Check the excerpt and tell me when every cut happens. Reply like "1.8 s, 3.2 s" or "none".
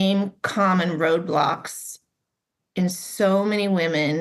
none